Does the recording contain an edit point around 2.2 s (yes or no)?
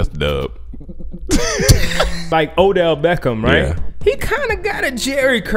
yes